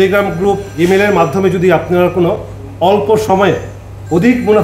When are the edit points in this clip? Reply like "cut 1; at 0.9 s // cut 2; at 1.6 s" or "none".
none